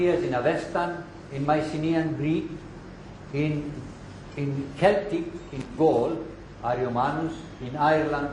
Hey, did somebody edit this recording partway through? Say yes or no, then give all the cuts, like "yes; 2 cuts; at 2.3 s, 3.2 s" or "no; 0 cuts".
yes; 1 cut; at 6.7 s